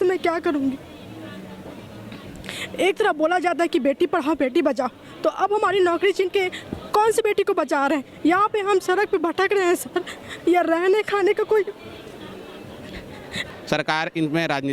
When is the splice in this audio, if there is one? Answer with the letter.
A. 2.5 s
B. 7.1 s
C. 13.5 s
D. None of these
C